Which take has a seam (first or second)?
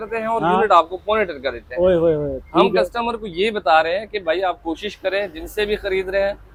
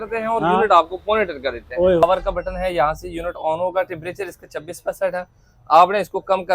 second